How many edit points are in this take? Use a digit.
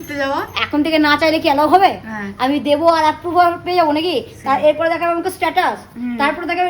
0